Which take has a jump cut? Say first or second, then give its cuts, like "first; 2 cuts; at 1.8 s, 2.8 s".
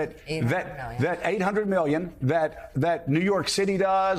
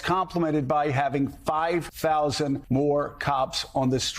second; 2 cuts; at 1.9 s, 2.6 s